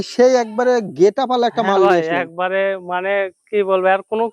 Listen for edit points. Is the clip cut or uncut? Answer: uncut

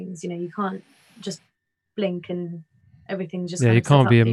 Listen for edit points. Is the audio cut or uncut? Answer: uncut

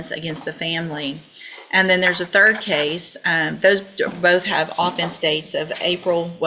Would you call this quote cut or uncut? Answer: uncut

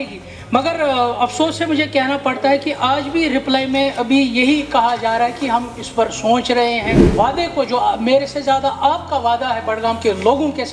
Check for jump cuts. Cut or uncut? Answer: cut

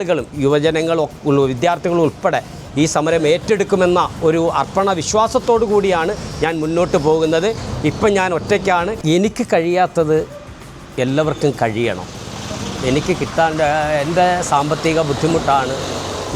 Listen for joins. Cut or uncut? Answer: cut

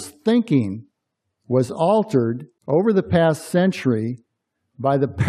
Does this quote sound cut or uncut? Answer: cut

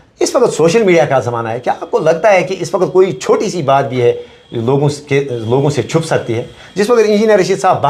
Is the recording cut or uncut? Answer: uncut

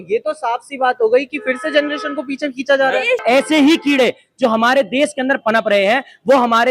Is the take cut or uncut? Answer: cut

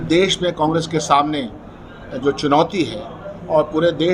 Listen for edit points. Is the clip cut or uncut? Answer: uncut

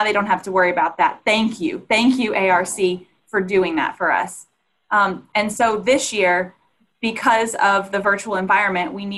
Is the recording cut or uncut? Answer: uncut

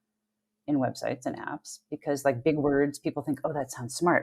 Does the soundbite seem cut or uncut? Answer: uncut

